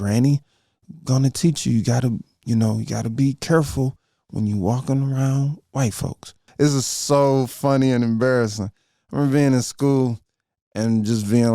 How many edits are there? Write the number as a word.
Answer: one